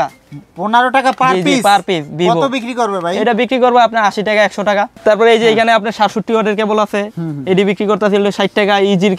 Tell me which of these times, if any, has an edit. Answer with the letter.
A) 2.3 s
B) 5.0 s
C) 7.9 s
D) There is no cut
D